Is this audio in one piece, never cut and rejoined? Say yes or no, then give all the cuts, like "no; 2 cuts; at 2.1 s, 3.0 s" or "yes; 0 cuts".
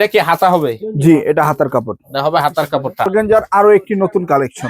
no; 1 cut; at 3.1 s